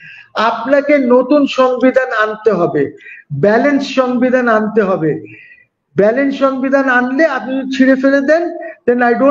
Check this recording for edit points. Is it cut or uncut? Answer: uncut